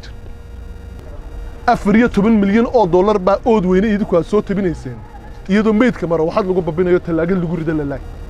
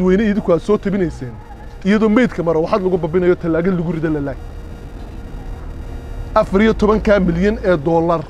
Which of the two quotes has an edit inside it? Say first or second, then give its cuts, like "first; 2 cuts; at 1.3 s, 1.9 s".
first; 1 cut; at 1.0 s